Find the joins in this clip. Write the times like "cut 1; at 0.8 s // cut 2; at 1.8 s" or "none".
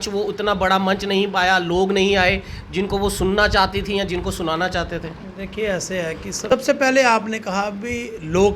none